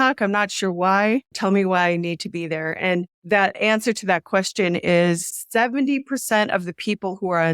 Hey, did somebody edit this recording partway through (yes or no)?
yes